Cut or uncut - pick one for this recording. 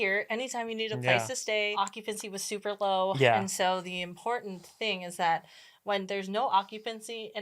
cut